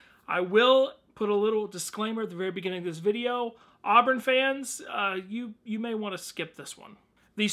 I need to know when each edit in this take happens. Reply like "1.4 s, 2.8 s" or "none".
3.4 s